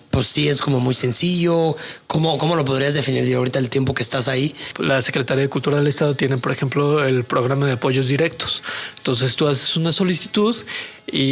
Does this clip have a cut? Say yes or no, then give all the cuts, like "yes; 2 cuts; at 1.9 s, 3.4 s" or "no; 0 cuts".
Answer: yes; 1 cut; at 4.7 s